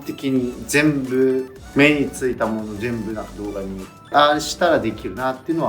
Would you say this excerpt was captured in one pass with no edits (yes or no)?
no